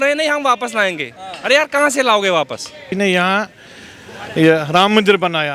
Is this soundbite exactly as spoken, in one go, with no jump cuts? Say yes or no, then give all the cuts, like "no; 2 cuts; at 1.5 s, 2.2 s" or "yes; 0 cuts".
no; 1 cut; at 2.9 s